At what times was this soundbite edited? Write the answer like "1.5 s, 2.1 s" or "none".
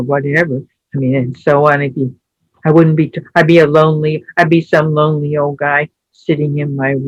none